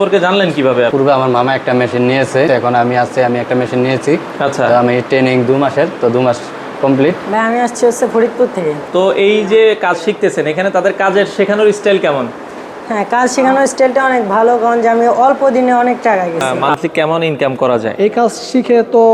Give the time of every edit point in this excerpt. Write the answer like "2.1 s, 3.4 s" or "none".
0.9 s, 2.5 s, 7.2 s, 8.8 s, 16.5 s